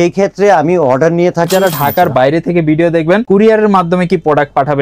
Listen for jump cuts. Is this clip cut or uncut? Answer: cut